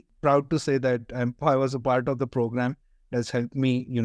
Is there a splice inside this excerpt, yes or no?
no